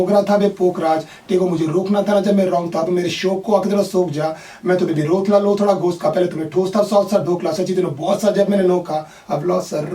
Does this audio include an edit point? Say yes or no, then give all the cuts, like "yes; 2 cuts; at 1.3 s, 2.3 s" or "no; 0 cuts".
no; 0 cuts